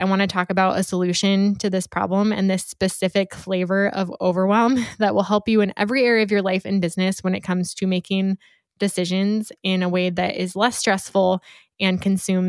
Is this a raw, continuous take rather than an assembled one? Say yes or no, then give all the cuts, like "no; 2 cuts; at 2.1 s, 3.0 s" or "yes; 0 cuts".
yes; 0 cuts